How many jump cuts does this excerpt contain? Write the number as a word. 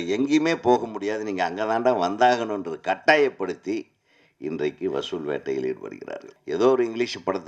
one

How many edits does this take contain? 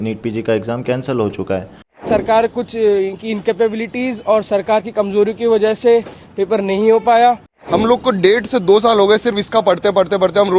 two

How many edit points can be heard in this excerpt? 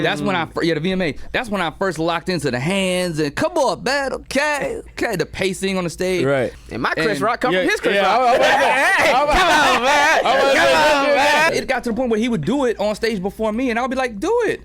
two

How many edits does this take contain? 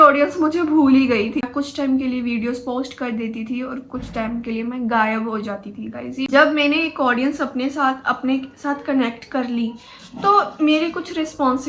two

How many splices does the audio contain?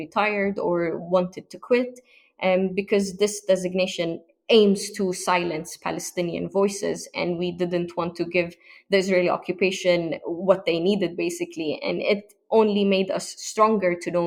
zero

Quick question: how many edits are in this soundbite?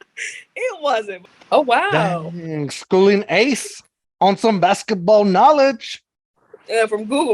one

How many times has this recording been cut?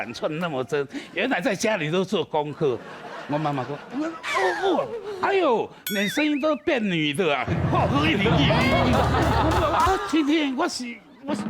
one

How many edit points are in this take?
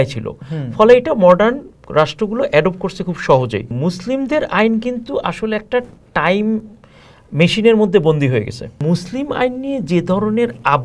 two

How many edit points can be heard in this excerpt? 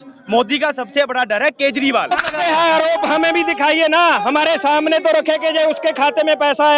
one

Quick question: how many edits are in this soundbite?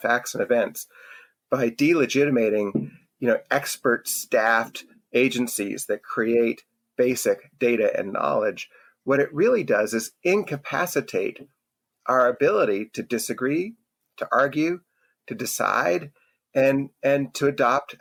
zero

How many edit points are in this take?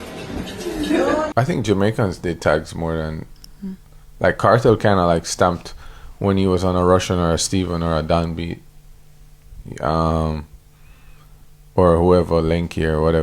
one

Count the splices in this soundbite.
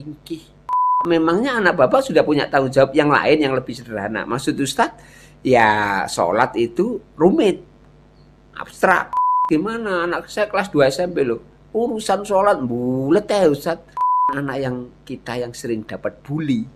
three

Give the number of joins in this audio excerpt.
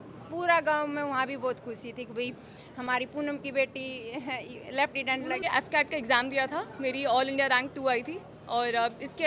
one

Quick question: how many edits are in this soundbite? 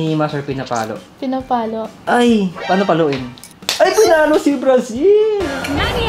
one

